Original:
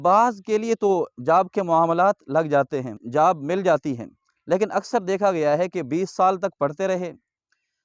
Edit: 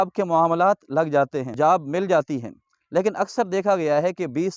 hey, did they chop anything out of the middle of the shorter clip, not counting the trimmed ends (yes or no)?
yes